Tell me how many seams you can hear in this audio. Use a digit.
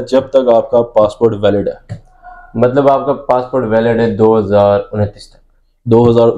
0